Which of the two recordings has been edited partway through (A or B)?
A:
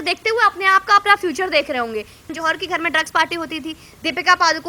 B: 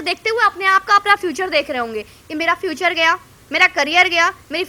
A